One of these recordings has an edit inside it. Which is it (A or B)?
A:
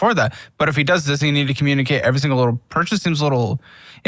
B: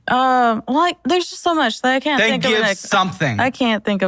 B